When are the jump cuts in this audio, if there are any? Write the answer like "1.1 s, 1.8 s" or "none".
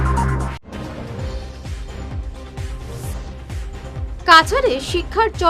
2.3 s